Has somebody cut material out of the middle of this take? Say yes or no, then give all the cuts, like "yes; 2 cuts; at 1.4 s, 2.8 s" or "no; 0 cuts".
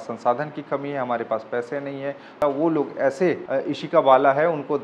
yes; 2 cuts; at 2.3 s, 3.8 s